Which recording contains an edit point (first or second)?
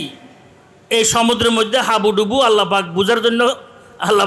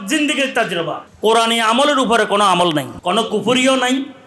second